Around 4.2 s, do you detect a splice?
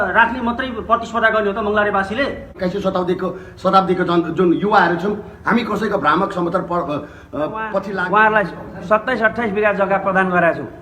no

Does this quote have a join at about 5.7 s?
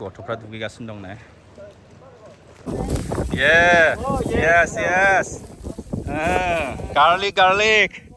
no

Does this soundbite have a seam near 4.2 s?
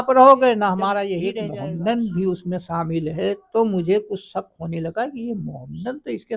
no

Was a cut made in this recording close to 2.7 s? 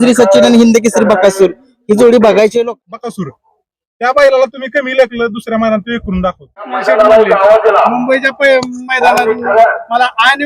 yes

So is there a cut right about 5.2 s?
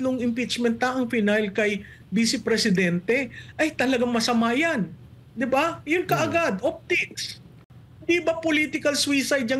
no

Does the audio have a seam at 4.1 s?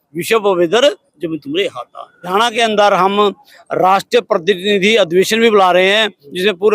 no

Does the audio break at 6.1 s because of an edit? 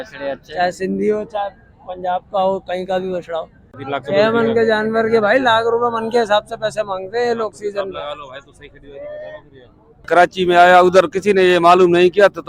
no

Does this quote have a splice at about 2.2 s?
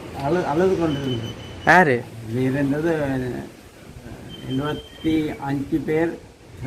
yes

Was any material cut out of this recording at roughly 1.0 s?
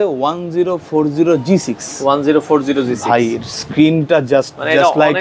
no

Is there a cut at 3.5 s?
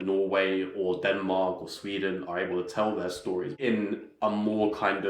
yes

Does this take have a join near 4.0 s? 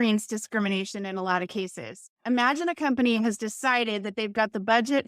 no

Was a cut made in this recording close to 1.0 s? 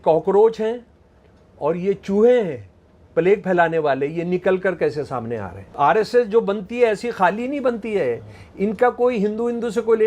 no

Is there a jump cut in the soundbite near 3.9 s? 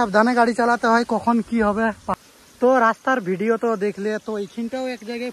no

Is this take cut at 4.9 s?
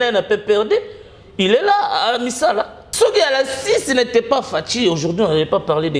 no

